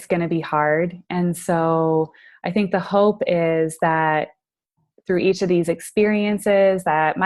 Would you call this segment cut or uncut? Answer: uncut